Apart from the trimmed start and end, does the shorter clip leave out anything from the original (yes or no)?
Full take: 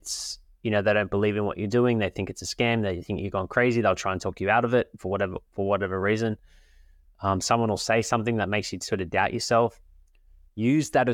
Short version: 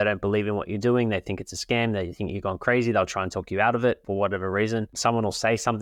yes